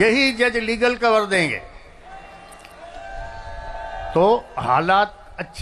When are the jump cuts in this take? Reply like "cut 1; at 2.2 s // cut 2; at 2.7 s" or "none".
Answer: none